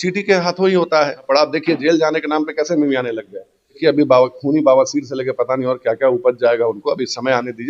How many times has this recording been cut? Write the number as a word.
two